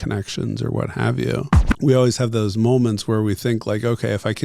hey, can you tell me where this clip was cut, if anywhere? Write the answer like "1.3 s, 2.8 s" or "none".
1.6 s

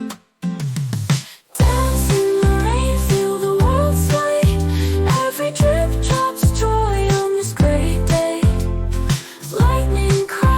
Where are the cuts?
1.0 s

